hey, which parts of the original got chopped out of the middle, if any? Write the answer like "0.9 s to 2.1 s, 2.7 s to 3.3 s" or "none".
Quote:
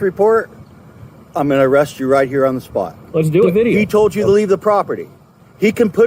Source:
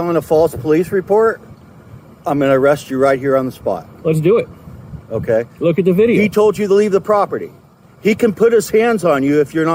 4.4 s to 5.9 s